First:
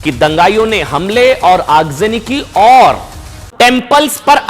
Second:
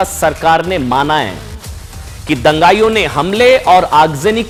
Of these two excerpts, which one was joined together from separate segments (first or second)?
first